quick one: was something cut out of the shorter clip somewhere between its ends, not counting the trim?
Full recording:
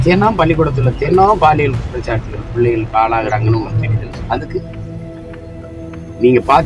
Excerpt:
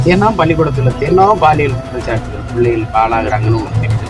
no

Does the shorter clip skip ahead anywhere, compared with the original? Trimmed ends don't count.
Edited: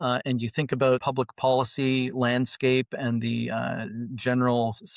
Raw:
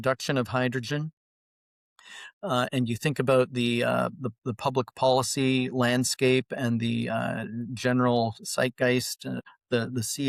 yes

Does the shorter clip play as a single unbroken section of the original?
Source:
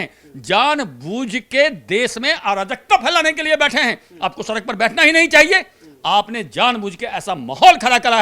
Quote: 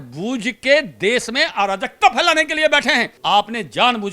no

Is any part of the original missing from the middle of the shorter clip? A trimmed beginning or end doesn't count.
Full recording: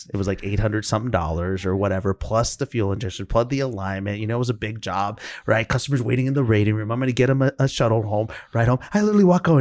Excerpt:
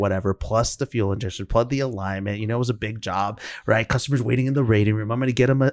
no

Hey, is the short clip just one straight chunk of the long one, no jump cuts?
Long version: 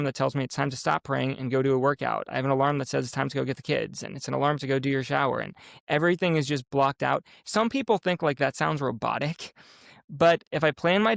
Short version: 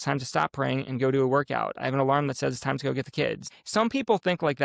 no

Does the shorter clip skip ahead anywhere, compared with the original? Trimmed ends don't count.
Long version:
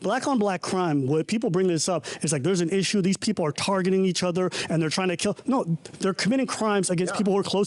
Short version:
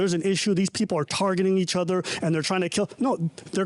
no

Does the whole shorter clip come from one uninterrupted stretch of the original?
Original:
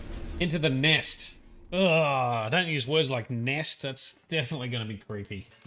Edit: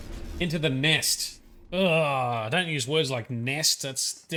yes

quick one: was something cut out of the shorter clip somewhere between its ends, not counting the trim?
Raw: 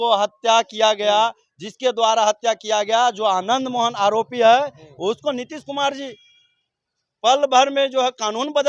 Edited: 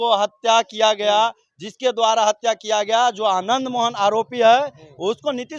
no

